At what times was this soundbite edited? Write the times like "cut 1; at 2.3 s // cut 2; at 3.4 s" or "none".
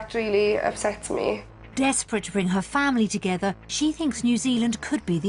cut 1; at 1.4 s